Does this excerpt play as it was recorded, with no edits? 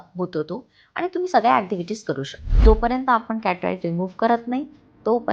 no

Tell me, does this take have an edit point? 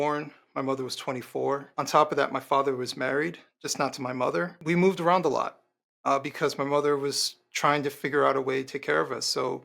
yes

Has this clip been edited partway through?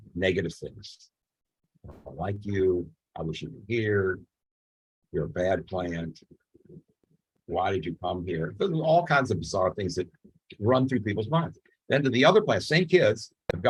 no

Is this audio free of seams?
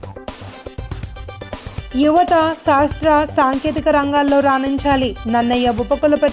no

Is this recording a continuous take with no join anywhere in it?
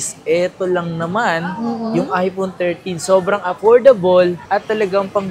yes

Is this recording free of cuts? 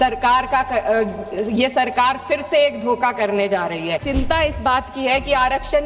no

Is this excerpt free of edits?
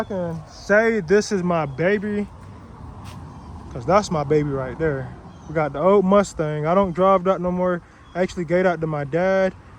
yes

